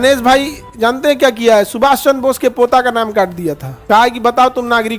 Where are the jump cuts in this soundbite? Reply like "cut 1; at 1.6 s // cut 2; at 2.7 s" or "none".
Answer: cut 1; at 3.7 s